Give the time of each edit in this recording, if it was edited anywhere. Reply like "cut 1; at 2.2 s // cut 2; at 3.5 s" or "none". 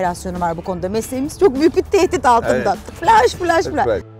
none